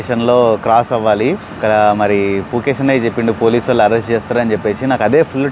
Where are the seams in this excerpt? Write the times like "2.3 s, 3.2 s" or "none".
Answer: 1.5 s